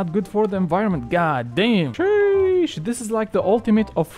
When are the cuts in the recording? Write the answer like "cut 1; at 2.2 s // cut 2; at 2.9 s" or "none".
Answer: none